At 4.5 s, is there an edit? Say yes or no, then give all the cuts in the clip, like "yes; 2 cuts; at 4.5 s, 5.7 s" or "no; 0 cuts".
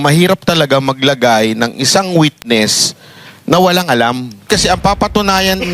yes; 1 cut; at 4.5 s